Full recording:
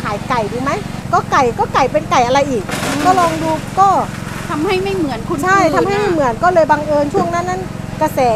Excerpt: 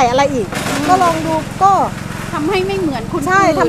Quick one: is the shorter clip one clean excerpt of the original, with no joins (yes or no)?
yes